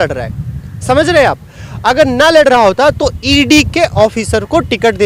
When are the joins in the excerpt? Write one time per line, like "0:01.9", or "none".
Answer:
none